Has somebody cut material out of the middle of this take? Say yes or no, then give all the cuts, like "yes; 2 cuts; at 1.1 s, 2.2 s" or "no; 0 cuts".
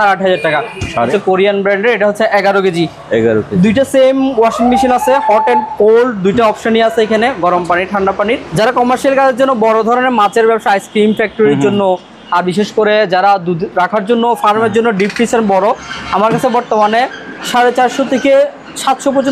yes; 2 cuts; at 1.1 s, 8.5 s